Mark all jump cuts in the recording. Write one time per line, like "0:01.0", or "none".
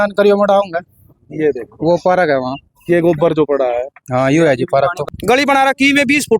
0:05.1